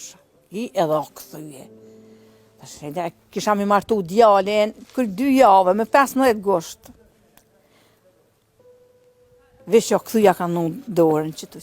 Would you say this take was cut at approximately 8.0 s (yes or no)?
yes